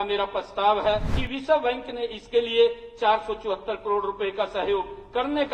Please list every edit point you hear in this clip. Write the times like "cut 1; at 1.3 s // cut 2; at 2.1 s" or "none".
cut 1; at 1.1 s